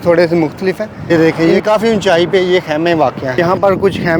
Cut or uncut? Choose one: cut